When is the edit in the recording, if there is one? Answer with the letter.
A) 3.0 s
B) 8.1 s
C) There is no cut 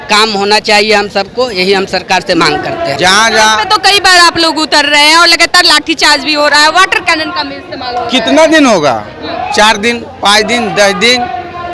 A